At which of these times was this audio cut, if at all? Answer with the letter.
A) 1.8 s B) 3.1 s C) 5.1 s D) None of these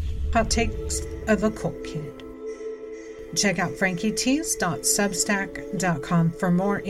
D